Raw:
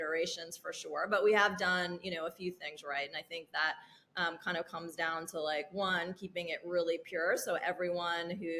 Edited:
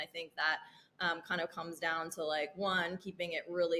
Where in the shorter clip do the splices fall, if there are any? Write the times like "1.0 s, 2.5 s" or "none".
none